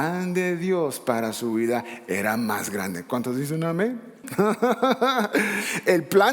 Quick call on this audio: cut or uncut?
cut